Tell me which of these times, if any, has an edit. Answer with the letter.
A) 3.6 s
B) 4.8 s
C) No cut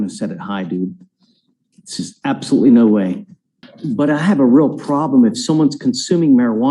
A